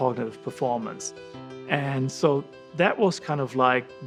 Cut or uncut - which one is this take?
uncut